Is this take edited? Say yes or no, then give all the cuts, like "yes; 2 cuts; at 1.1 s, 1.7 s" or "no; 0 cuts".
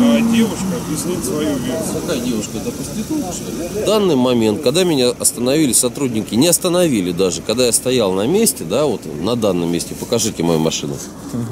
yes; 2 cuts; at 2.0 s, 3.8 s